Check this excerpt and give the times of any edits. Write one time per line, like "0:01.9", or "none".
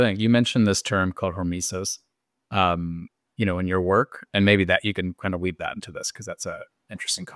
none